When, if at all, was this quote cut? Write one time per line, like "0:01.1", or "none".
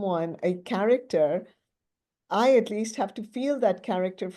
none